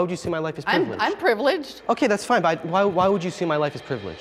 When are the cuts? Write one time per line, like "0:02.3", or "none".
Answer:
none